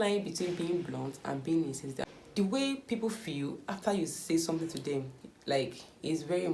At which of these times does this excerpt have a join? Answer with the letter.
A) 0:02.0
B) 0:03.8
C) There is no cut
A